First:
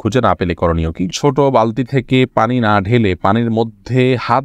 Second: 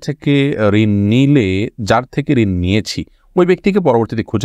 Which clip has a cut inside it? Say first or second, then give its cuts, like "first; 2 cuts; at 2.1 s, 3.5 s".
first; 1 cut; at 1.1 s